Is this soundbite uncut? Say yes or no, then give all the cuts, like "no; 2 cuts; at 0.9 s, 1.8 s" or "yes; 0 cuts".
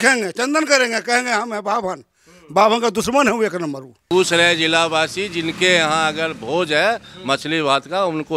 no; 1 cut; at 4.1 s